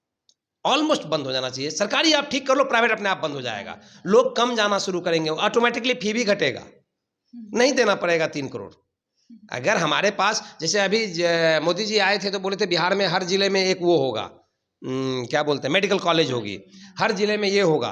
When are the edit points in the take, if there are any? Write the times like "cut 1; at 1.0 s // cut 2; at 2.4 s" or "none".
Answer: none

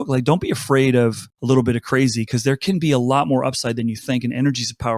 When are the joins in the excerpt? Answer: cut 1; at 1.3 s

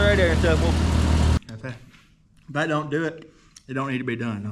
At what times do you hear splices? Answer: cut 1; at 1.4 s

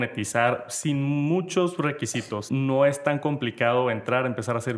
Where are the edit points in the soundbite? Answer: cut 1; at 2.4 s

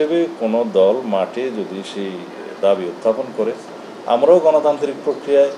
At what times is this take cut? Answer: none

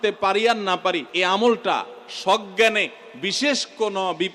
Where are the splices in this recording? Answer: cut 1; at 1.1 s

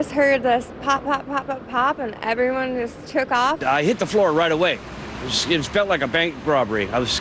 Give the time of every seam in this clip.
cut 1; at 3.6 s

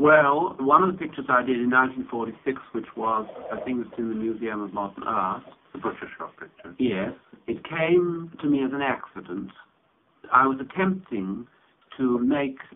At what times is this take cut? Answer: cut 1; at 4.7 s

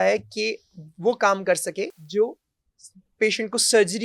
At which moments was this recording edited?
cut 1; at 2.0 s

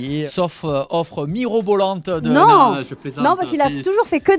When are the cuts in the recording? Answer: none

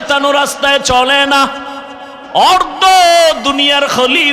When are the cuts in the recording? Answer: cut 1; at 2.2 s

